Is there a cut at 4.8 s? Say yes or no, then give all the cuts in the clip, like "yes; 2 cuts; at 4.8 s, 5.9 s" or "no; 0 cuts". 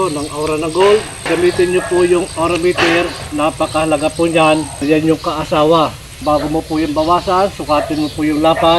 yes; 3 cuts; at 1.3 s, 4.8 s, 6.2 s